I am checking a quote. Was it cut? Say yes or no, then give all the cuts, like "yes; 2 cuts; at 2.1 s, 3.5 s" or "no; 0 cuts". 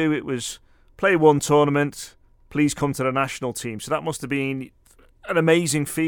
no; 0 cuts